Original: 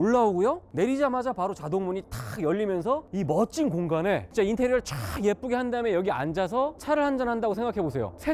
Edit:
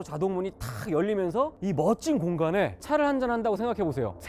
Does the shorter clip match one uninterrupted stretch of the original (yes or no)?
no